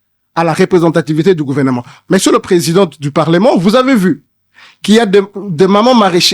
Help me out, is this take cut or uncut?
uncut